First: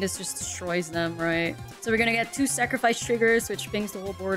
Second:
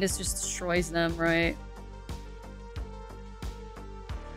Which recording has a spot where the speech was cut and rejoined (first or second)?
first